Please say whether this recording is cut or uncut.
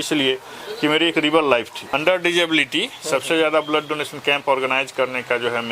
cut